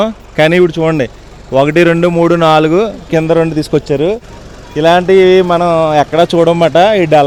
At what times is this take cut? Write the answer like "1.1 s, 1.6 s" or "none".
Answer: none